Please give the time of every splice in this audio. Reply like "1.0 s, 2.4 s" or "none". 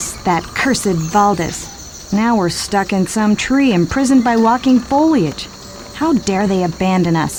none